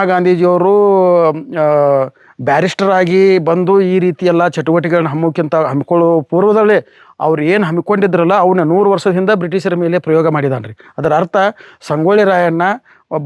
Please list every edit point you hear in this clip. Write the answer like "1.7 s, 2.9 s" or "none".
none